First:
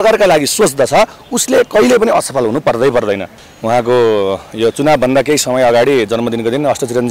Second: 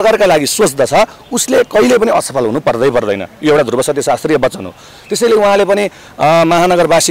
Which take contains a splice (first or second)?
first